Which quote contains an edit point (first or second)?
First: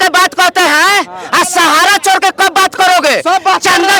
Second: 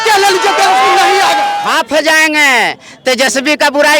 second